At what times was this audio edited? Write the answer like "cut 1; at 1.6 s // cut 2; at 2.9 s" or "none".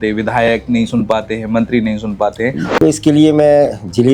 cut 1; at 2.6 s